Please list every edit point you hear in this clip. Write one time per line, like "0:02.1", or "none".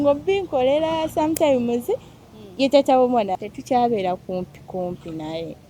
0:03.4